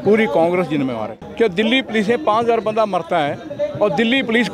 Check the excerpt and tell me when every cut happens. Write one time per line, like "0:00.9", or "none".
0:01.1